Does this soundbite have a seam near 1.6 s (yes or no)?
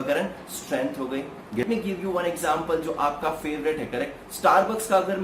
yes